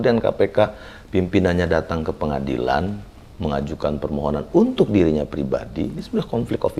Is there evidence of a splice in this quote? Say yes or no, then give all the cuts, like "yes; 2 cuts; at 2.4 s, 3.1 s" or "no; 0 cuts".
no; 0 cuts